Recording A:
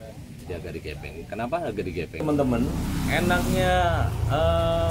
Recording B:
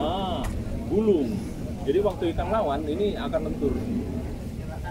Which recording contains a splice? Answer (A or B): A